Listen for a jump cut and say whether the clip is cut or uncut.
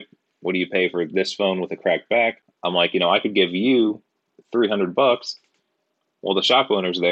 cut